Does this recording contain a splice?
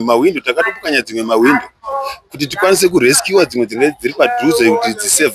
no; 0 cuts

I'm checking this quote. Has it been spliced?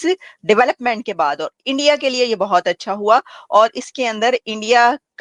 no; 0 cuts

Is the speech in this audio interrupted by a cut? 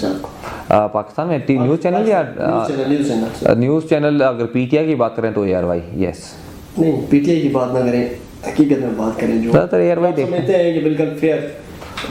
no; 0 cuts

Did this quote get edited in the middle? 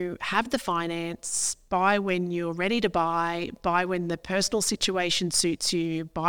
no; 0 cuts

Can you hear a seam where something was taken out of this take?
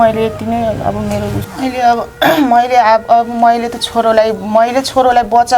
yes; 1 cut; at 1.4 s

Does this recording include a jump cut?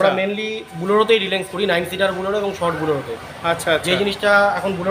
no; 0 cuts

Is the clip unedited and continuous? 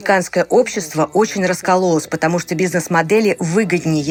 yes; 0 cuts

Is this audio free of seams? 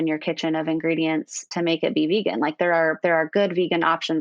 yes; 0 cuts

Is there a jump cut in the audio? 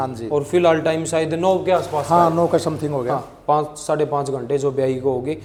no; 0 cuts

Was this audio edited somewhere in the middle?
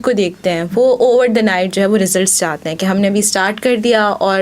no; 0 cuts

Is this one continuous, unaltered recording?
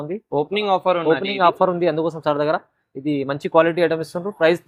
yes; 0 cuts

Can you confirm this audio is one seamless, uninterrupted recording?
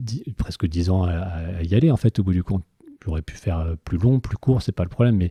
yes; 0 cuts

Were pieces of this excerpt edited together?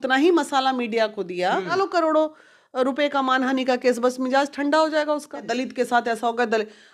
yes; 2 cuts; at 1.7 s, 5.5 s

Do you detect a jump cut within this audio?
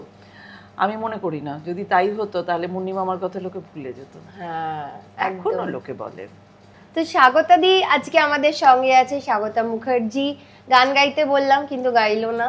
no; 0 cuts

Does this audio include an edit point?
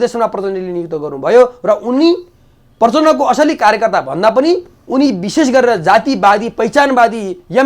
no; 0 cuts

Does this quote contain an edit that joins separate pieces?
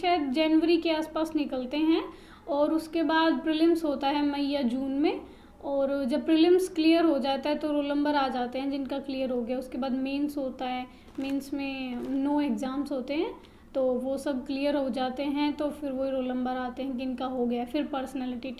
no; 0 cuts

